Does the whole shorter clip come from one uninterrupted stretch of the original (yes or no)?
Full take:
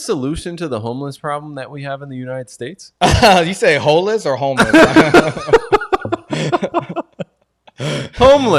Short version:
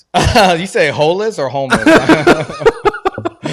yes